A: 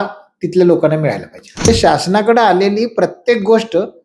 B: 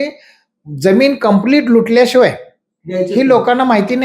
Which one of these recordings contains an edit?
A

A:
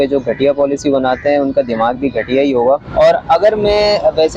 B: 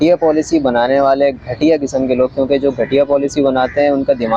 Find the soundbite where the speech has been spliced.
A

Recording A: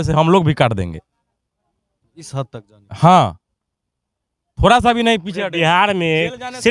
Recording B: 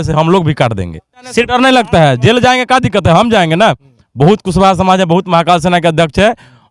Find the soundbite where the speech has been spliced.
B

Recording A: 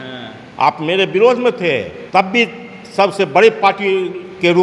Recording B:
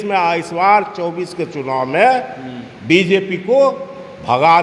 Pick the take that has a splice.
A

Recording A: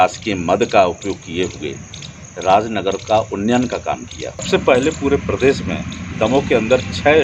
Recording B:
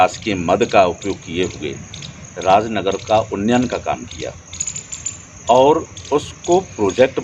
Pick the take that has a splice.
A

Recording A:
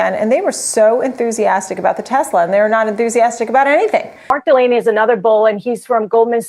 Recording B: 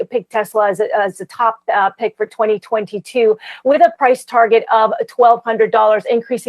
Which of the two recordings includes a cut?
A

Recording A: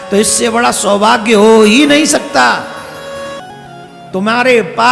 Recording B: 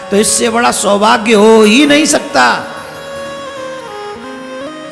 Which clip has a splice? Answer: A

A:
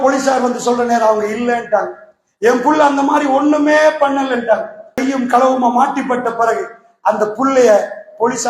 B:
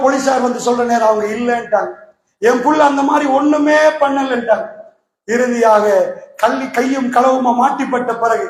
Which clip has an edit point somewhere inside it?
A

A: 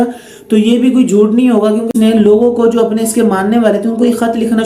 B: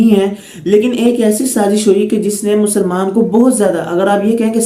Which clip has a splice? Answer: A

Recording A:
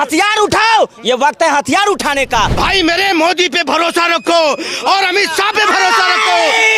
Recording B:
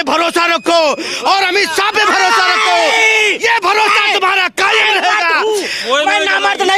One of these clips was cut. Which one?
A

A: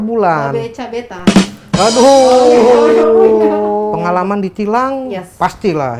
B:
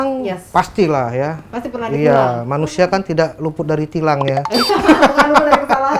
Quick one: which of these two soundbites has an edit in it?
A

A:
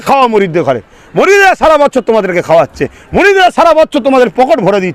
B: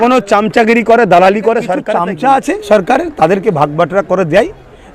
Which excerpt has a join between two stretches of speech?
B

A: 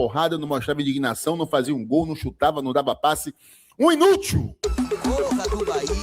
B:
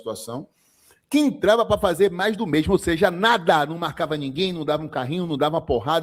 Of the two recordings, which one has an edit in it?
A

